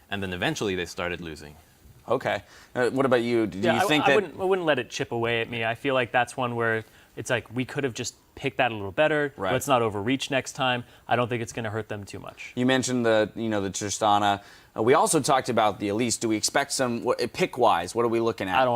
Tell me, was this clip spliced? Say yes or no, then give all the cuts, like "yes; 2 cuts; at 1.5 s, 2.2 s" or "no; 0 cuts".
yes; 1 cut; at 15.8 s